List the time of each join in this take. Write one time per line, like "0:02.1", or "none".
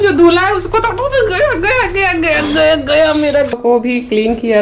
0:03.5